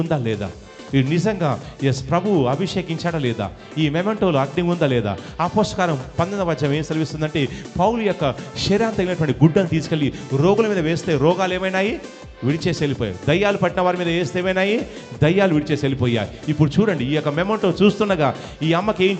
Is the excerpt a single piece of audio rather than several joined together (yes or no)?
yes